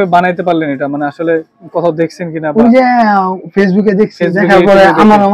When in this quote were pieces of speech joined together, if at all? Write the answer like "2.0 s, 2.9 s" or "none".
none